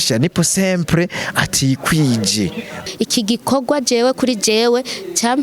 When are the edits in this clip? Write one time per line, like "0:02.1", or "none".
0:02.8